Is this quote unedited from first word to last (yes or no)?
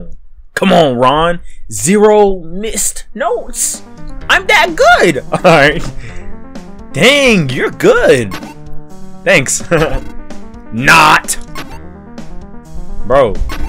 yes